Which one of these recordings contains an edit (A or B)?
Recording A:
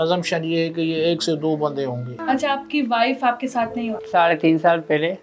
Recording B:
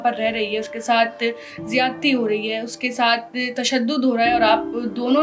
A